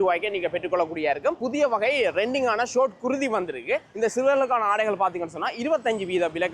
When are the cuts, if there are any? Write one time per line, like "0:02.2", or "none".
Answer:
0:01.4
0:03.9